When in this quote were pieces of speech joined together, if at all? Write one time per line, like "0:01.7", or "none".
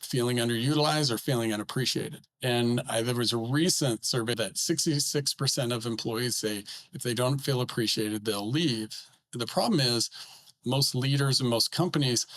0:02.2
0:04.3
0:10.5